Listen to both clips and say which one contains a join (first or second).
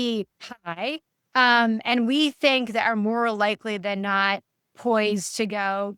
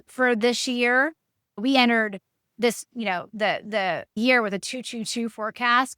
second